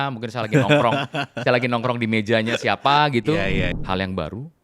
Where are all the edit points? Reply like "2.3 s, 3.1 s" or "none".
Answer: 3.7 s